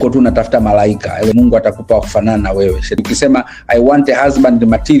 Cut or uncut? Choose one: cut